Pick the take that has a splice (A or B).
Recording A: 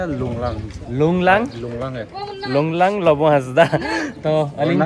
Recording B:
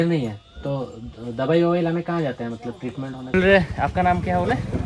B